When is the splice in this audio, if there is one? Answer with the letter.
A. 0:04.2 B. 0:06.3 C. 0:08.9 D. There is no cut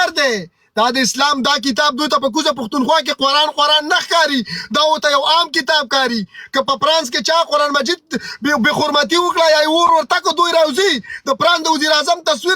D